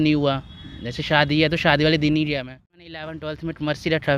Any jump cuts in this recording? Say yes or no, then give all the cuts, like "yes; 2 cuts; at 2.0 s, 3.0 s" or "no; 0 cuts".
yes; 1 cut; at 3.1 s